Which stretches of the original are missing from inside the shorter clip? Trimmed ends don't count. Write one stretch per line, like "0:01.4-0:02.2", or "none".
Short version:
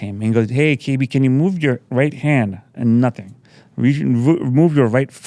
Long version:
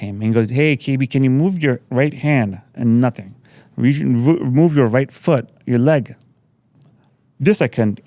none